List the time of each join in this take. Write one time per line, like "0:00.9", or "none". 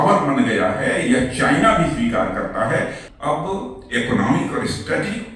0:03.1